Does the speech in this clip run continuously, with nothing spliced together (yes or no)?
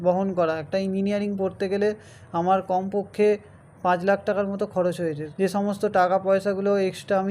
no